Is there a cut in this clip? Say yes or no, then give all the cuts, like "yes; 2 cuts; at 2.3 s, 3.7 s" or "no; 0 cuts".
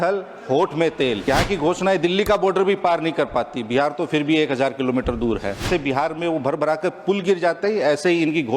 yes; 2 cuts; at 1.2 s, 5.7 s